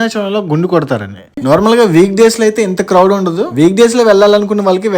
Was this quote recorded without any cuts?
no; 1 cut; at 1.3 s

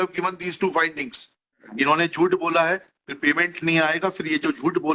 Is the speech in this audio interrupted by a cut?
yes; 1 cut; at 1.6 s

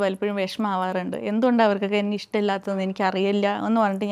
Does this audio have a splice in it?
no; 0 cuts

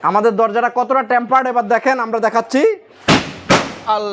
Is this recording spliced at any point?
no; 0 cuts

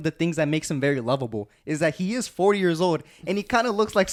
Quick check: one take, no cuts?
yes; 0 cuts

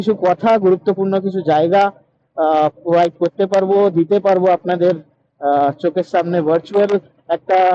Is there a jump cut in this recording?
no; 0 cuts

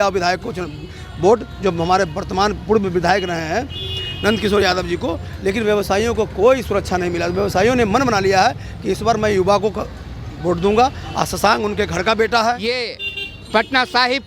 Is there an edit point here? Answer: yes; 1 cut; at 12.7 s

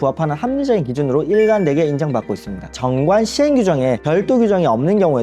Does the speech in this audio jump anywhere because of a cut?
yes; 1 cut; at 2.7 s

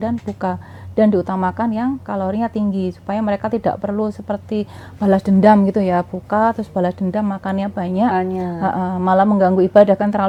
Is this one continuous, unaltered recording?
yes; 0 cuts

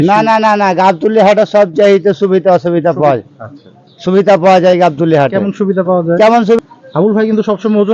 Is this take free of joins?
no; 1 cut; at 6.6 s

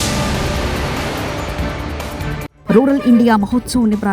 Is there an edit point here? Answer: yes; 1 cut; at 2.5 s

